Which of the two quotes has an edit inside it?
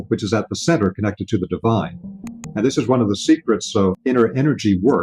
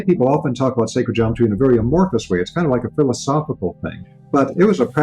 first; 2 cuts; at 2.1 s, 4.0 s

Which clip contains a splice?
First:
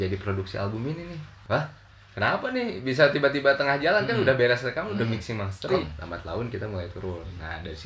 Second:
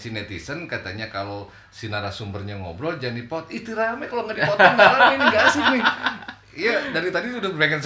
first; 2 cuts; at 1.3 s, 5.9 s

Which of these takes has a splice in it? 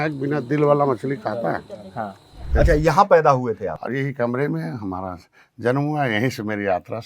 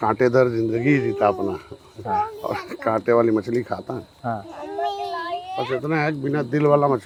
first; 2 cuts; at 2.5 s, 3.7 s

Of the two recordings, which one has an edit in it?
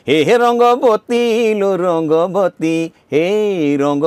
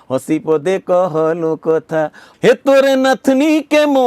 second; 1 cut; at 2.2 s

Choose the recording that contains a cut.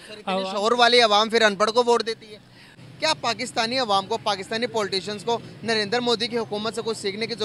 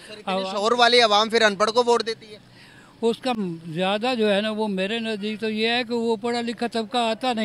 first; 1 cut; at 2.8 s

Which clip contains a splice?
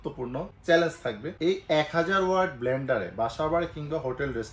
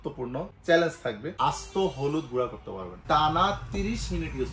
second; 2 cuts; at 1.3 s, 2.9 s

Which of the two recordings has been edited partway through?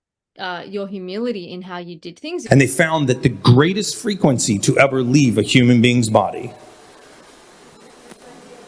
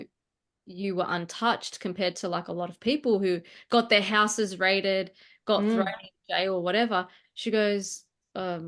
first; 1 cut; at 2.4 s

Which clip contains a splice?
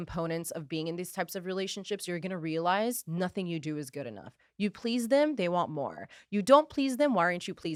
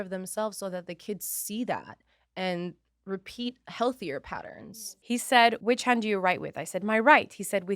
second; 2 cuts; at 4.7 s, 5.6 s

